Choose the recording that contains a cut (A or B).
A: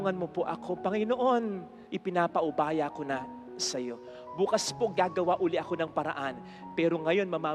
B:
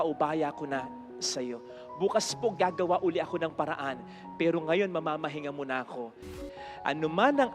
B